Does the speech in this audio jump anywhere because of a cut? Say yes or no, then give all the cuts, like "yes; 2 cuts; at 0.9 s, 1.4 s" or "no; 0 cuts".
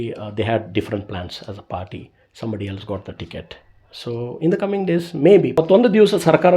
yes; 1 cut; at 5.6 s